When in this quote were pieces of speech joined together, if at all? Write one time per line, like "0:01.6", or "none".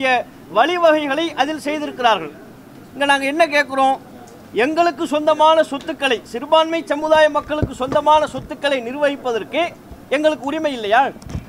none